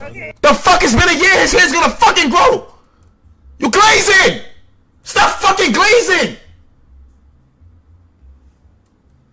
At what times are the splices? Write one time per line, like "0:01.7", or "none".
0:08.2